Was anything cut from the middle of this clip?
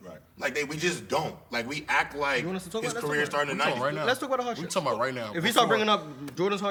no; 0 cuts

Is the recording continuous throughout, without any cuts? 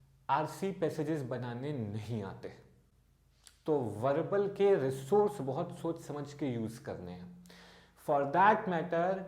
yes; 0 cuts

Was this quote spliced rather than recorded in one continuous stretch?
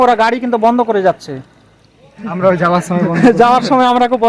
no; 0 cuts

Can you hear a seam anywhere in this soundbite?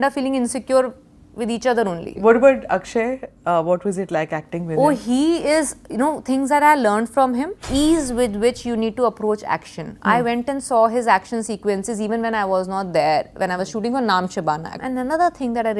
yes; 3 cuts; at 2.1 s, 7.6 s, 14.8 s

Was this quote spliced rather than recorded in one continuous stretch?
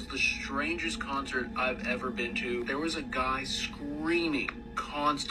no; 0 cuts

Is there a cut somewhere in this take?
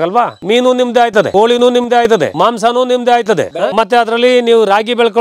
yes; 1 cut; at 3.6 s

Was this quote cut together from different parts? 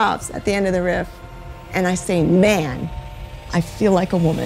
no; 0 cuts

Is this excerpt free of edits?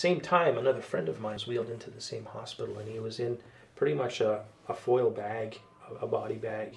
no; 1 cut; at 1.4 s

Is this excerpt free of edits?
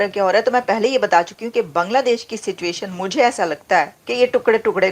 no; 1 cut; at 4.0 s

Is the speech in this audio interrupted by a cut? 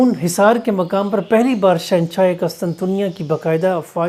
no; 0 cuts

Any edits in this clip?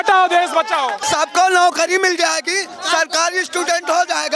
yes; 1 cut; at 1.0 s

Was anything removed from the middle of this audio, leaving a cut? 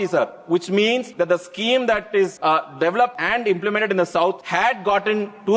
yes; 4 cuts; at 1.1 s, 2.4 s, 3.2 s, 4.4 s

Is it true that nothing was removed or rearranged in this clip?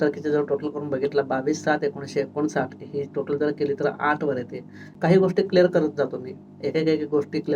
yes; 0 cuts

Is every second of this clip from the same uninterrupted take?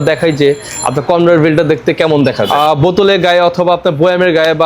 no; 1 cut; at 2.4 s

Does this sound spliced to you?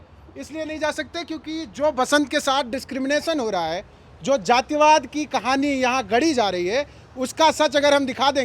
no; 0 cuts

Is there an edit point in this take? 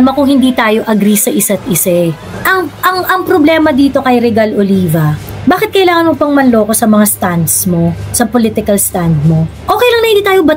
no; 0 cuts

